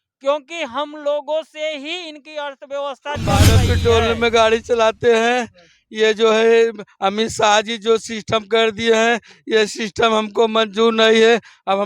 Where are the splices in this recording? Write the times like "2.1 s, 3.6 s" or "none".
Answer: 3.5 s